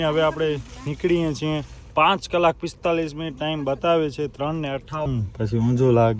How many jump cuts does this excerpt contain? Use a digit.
1